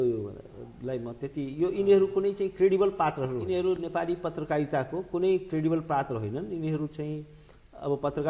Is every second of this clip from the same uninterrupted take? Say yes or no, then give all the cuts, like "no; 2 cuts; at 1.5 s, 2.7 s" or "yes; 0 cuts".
no; 1 cut; at 3.4 s